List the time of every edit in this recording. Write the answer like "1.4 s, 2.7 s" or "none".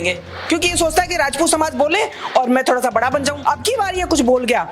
3.4 s